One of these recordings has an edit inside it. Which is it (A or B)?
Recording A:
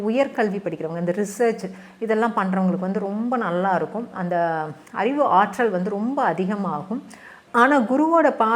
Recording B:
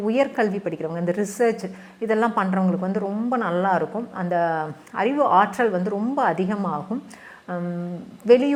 A